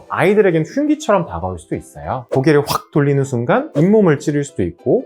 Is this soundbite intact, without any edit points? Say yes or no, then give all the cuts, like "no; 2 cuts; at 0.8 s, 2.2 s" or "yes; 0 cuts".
no; 1 cut; at 2.3 s